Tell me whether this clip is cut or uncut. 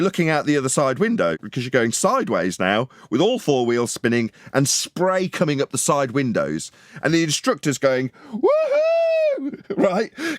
cut